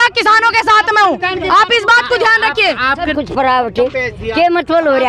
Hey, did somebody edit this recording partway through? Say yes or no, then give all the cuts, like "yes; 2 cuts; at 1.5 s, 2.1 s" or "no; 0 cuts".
yes; 1 cut; at 3.1 s